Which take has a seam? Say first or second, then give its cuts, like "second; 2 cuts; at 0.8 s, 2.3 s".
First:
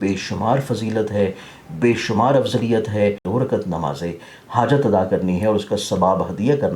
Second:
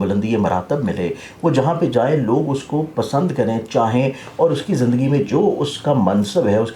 first; 1 cut; at 3.2 s